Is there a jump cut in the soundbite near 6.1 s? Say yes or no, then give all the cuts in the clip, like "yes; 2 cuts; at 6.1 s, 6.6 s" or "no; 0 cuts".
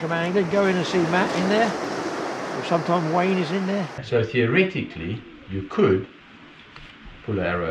no; 1 cut; at 4.0 s